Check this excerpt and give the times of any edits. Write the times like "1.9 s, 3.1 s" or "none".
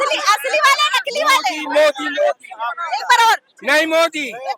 none